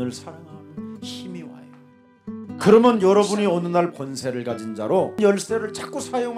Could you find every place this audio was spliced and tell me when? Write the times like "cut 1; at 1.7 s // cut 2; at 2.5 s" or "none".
cut 1; at 4.0 s // cut 2; at 5.2 s